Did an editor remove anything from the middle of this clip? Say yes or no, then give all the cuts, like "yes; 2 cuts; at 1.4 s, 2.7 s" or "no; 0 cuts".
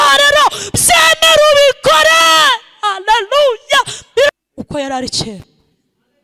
yes; 1 cut; at 4.3 s